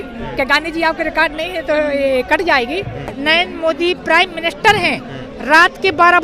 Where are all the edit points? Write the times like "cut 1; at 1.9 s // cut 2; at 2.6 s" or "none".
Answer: cut 1; at 3.2 s